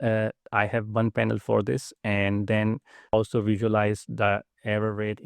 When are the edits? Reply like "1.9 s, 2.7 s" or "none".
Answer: 3.1 s